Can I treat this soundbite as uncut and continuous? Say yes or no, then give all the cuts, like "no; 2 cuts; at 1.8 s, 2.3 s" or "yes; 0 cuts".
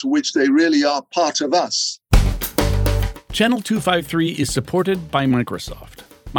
no; 1 cut; at 2.0 s